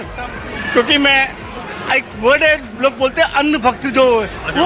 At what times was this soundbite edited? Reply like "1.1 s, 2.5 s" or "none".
none